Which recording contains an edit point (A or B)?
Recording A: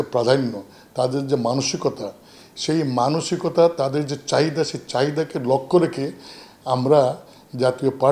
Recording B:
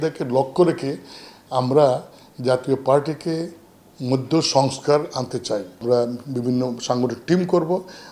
B